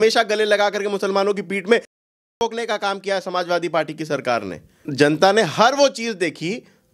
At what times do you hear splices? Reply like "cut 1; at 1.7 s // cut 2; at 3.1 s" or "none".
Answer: cut 1; at 4.9 s